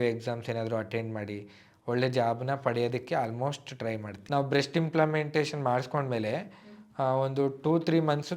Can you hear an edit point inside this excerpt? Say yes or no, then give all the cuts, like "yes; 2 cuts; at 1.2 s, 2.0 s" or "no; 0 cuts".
yes; 1 cut; at 4.1 s